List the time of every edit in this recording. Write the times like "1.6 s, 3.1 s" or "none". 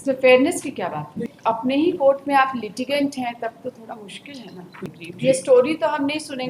1.3 s, 4.8 s